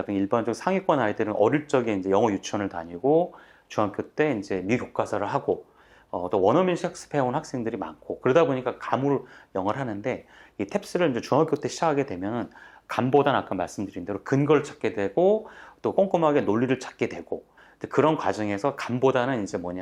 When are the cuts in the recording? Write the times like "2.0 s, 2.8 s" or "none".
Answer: none